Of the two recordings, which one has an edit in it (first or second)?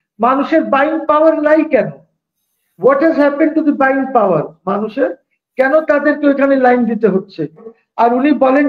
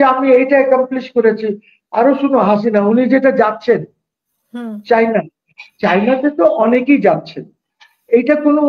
first